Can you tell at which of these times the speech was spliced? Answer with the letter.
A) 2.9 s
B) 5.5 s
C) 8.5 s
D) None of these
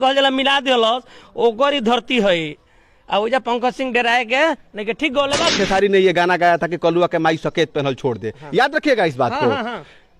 B